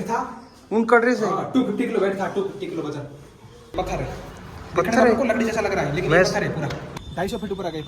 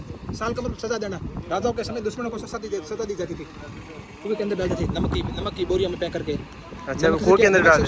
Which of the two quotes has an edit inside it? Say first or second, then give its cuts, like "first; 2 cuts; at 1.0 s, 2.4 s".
first; 2 cuts; at 3.7 s, 6.8 s